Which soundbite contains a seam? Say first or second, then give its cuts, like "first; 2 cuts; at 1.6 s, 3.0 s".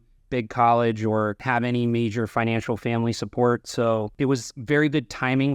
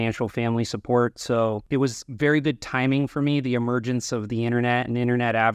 first; 1 cut; at 1.4 s